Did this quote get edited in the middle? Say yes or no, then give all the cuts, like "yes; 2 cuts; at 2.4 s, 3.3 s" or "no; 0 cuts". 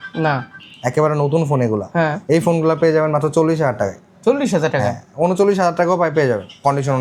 no; 0 cuts